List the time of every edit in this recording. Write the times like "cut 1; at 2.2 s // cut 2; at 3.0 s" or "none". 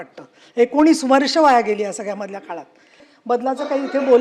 cut 1; at 3.0 s